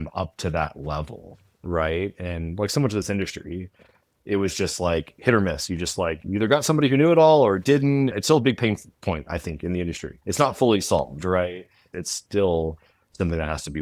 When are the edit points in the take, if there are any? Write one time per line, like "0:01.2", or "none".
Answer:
0:08.2
0:10.1